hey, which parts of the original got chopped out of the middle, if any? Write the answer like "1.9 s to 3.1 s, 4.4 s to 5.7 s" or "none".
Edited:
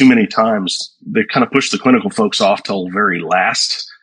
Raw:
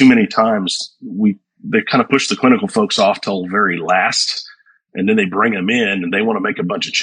0.9 s to 1.5 s